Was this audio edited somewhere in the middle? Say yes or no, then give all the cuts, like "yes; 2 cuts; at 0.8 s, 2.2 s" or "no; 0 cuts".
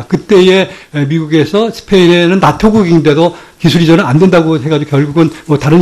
no; 0 cuts